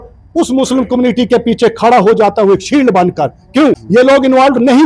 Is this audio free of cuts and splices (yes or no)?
no